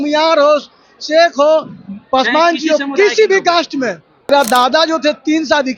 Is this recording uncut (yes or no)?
no